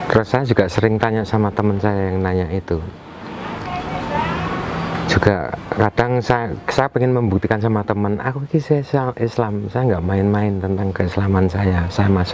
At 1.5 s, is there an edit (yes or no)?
no